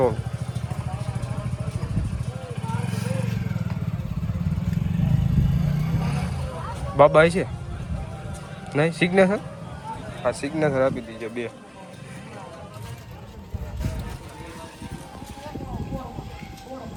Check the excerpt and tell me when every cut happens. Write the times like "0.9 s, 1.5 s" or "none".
none